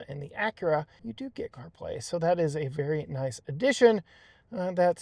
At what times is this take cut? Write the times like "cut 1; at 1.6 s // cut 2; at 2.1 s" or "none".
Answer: cut 1; at 1.0 s